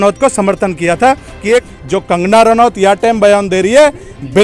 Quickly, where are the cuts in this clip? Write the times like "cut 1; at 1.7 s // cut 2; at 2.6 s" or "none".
cut 1; at 1.6 s